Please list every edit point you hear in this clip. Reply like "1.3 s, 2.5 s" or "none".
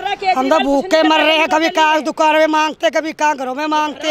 none

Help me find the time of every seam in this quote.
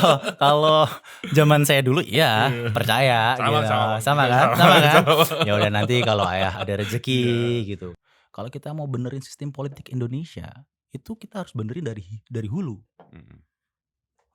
7.9 s

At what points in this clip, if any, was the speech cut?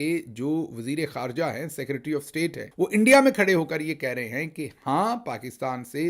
2.6 s

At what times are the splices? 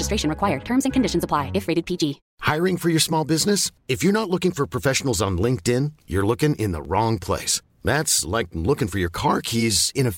2.3 s

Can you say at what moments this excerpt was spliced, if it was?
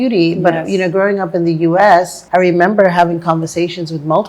2.2 s

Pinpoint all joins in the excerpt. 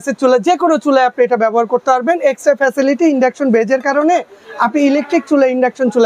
none

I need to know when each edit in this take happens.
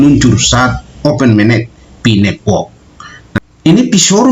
3.0 s

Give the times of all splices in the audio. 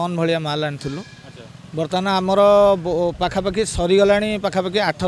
none

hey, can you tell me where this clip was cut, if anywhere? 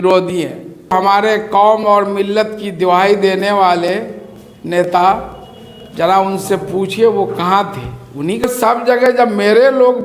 1.1 s, 8.4 s

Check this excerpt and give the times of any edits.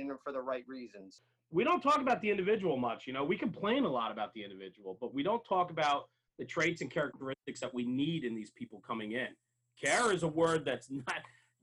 1.2 s

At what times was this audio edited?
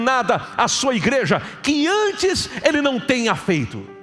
none

